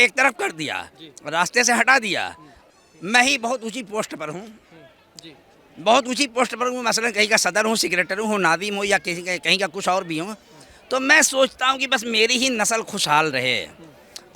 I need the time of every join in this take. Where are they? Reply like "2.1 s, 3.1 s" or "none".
2.6 s